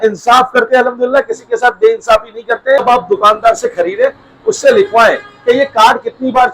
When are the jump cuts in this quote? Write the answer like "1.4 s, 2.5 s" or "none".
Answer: 2.8 s